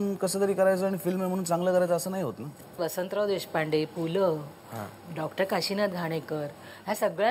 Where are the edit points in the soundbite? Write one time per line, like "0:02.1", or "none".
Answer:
0:02.8